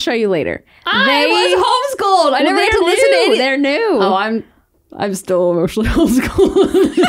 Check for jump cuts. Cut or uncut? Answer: uncut